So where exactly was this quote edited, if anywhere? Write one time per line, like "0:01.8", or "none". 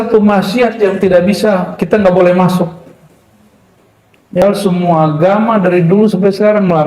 0:04.4